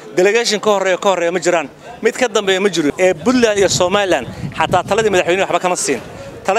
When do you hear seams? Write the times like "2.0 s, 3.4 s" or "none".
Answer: 2.9 s